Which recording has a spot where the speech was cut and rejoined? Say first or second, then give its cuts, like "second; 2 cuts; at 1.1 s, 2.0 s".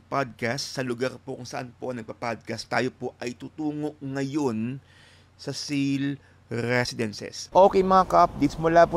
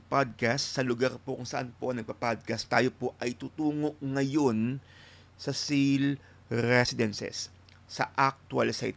first; 1 cut; at 7.3 s